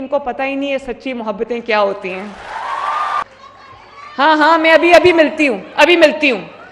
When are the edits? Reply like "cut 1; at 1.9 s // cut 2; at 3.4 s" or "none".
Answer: cut 1; at 3.3 s